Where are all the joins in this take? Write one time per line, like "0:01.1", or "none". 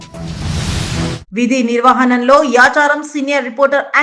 none